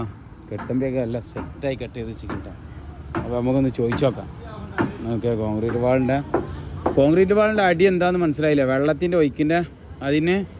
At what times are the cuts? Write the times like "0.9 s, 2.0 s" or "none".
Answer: none